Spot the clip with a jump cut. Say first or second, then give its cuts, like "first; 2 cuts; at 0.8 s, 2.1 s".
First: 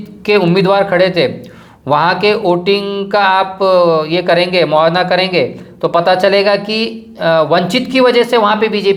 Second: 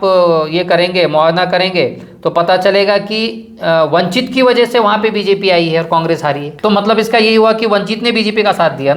second; 1 cut; at 6.5 s